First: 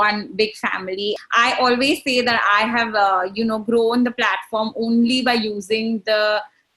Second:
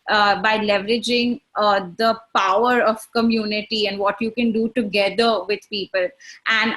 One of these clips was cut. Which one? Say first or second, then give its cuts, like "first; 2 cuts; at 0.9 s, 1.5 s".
first; 1 cut; at 1.0 s